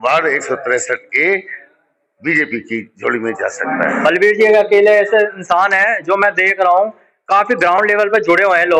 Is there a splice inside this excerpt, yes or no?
yes